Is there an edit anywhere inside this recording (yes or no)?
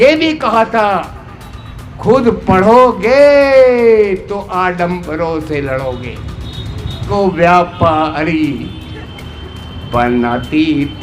yes